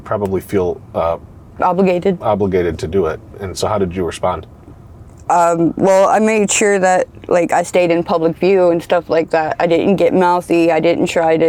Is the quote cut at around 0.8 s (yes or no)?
no